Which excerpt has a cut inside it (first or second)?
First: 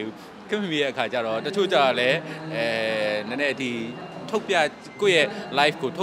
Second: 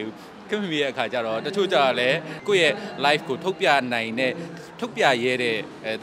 second